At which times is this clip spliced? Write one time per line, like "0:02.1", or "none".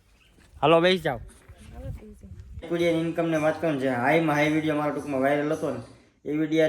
0:02.7